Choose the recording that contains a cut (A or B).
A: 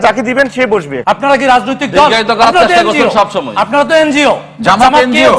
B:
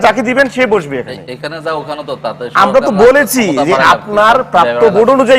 A